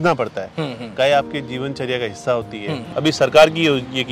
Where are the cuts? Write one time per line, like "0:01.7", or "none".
0:02.9